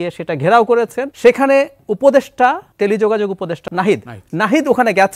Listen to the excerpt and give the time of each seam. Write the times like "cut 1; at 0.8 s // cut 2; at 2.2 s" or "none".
cut 1; at 1.0 s // cut 2; at 2.7 s // cut 3; at 3.6 s

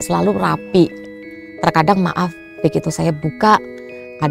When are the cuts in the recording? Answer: none

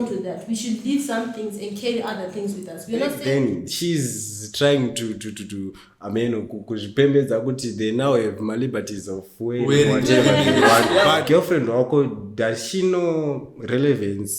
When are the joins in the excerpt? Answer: cut 1; at 3.2 s // cut 2; at 11.1 s

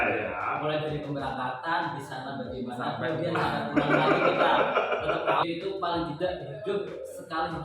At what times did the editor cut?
cut 1; at 5.4 s

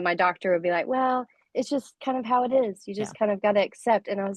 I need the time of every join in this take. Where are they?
none

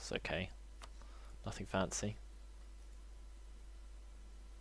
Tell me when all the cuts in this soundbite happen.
none

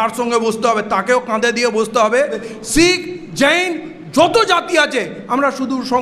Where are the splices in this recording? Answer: cut 1; at 2.5 s

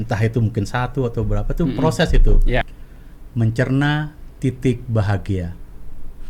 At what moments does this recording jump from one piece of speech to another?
cut 1; at 2.7 s

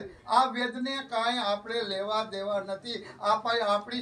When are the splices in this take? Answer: none

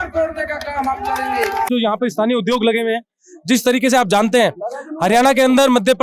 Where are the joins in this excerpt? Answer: cut 1; at 1.7 s

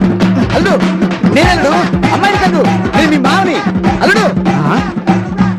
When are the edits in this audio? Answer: none

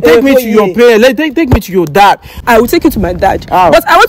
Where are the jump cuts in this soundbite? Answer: cut 1; at 2.3 s

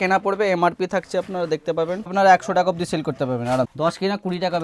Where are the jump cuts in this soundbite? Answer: cut 1; at 2.1 s // cut 2; at 3.7 s

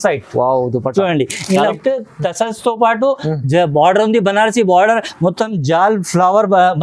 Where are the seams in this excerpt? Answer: cut 1; at 1.7 s

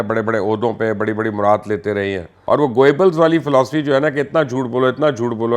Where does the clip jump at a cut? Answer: cut 1; at 2.3 s

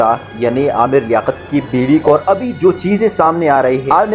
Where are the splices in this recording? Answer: cut 1; at 2.1 s

